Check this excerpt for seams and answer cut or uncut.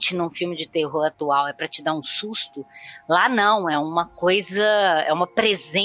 uncut